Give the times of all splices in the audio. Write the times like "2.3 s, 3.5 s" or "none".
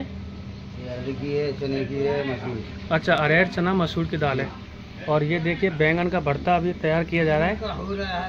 none